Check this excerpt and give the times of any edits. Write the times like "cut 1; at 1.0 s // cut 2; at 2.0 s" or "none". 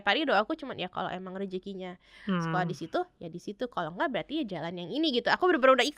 none